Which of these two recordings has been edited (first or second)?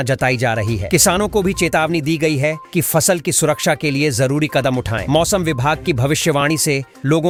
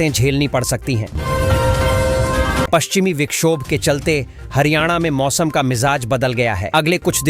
second